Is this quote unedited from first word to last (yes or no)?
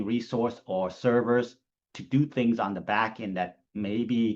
yes